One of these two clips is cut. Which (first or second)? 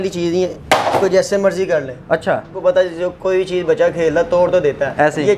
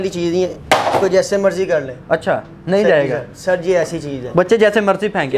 first